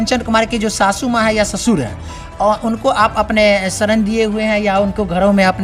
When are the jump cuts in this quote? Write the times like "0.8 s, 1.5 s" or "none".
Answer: none